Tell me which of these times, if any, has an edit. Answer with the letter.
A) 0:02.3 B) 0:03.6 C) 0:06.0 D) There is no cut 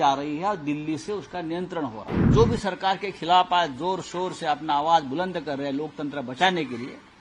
A